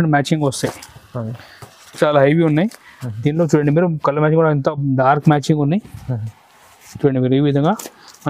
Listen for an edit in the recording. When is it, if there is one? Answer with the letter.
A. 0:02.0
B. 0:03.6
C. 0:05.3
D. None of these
A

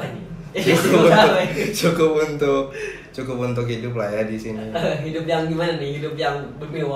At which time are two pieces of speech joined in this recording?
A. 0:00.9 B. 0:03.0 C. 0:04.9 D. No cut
D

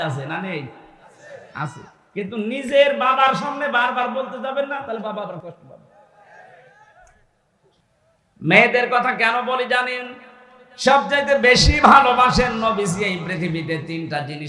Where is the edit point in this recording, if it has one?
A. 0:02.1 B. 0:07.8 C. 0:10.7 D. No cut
B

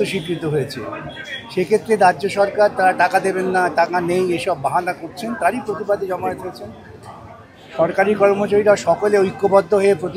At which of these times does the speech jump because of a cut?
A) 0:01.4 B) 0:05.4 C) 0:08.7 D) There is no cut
D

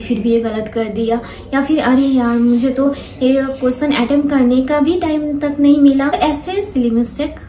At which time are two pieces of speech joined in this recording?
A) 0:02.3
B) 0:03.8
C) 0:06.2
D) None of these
C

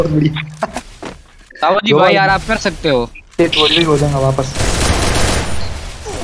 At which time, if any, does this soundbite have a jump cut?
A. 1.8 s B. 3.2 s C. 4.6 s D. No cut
B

